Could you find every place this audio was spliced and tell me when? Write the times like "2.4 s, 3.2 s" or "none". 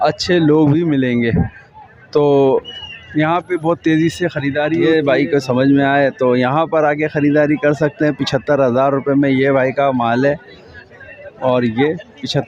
4.8 s